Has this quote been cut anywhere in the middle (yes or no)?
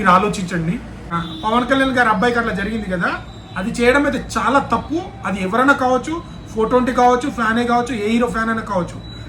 yes